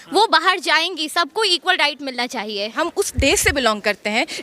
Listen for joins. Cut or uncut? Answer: cut